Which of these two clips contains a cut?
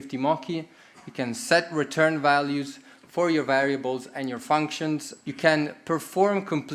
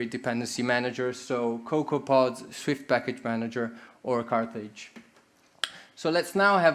first; 1 cut; at 5.1 s

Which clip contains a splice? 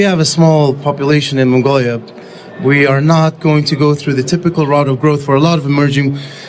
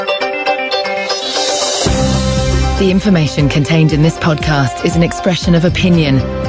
first; 1 cut; at 1.0 s

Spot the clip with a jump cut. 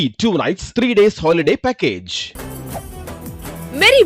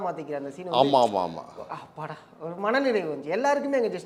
first; 1 cut; at 2.2 s

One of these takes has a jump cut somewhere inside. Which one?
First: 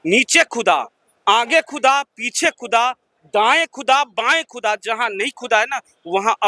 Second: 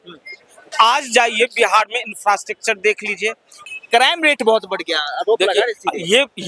second; 1 cut; at 3.6 s

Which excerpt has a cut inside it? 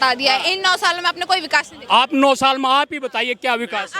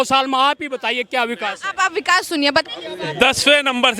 second; 1 cut; at 2.6 s

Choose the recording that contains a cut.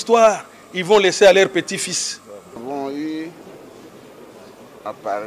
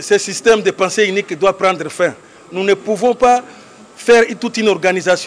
first; 1 cut; at 2.6 s

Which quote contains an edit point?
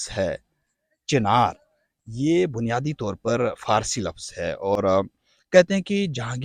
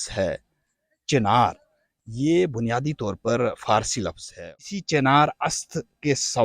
second; 1 cut; at 4.5 s

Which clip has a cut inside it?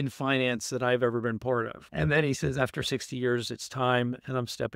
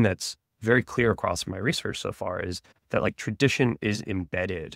first; 1 cut; at 1.8 s

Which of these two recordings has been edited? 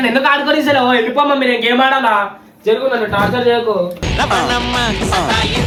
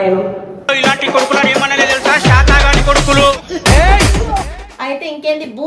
second; 1 cut; at 4.6 s

